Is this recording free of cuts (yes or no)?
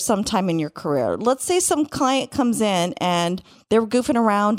yes